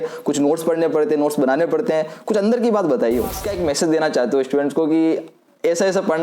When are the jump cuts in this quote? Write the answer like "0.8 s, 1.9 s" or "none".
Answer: 3.4 s